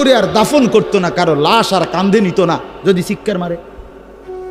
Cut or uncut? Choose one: uncut